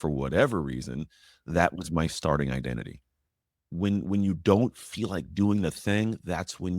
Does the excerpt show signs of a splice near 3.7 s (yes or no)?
yes